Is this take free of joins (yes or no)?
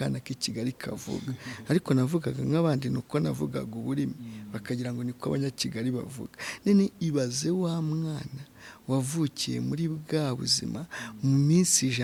yes